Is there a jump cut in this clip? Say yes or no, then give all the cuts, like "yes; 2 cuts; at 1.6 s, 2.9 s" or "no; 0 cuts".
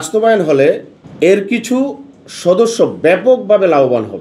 no; 0 cuts